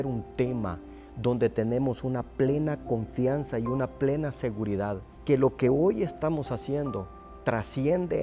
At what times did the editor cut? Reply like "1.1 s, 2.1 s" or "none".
5.1 s